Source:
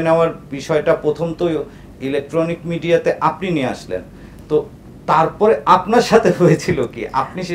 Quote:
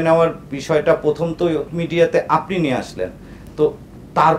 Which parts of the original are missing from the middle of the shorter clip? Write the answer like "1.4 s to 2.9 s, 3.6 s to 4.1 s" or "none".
1.8 s to 2.7 s